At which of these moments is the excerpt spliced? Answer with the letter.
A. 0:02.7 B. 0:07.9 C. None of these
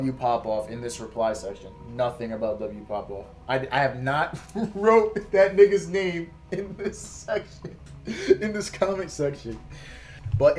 C